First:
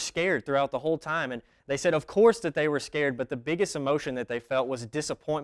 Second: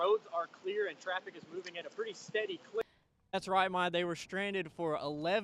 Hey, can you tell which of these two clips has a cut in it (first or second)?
second